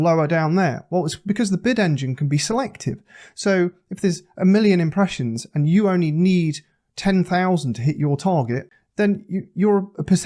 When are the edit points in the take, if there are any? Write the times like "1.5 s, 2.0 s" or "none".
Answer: 8.7 s